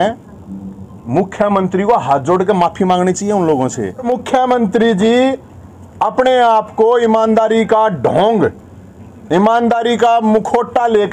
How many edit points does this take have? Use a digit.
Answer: 1